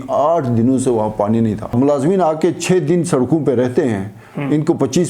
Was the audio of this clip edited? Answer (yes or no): yes